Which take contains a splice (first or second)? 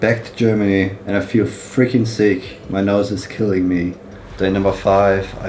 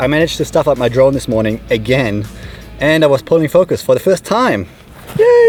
first